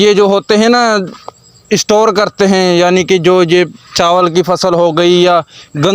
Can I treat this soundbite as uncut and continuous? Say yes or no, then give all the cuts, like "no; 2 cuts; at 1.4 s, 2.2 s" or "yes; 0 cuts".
yes; 0 cuts